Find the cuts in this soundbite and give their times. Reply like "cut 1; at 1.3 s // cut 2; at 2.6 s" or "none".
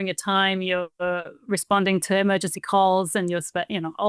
none